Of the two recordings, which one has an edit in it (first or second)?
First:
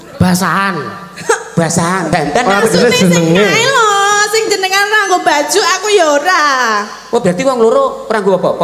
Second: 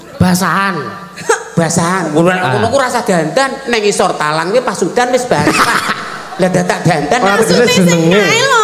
first